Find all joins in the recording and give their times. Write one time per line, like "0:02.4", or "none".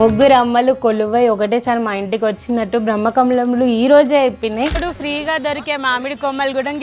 0:04.7